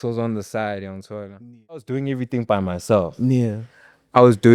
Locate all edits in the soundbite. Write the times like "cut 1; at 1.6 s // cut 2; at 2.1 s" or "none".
cut 1; at 1.9 s